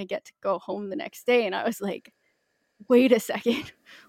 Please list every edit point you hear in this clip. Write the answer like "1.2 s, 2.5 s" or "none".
none